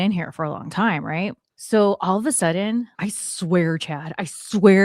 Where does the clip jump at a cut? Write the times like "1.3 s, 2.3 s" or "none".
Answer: 1.5 s, 2.9 s